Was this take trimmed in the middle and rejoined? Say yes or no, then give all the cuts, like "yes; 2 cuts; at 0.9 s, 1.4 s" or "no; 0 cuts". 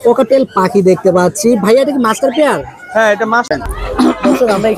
yes; 1 cut; at 3.5 s